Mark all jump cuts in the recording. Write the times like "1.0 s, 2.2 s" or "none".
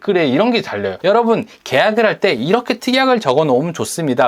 0.9 s